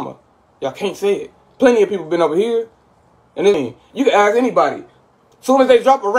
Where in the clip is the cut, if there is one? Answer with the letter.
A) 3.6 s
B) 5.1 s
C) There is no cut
A